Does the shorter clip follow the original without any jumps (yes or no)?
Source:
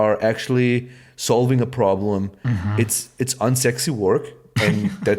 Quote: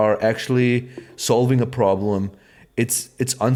yes